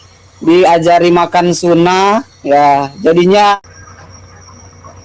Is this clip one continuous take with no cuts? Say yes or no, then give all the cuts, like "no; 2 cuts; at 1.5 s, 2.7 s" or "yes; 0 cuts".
yes; 0 cuts